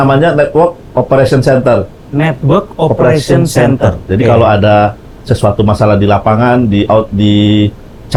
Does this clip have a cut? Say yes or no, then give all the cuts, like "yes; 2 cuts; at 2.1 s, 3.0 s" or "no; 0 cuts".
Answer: no; 0 cuts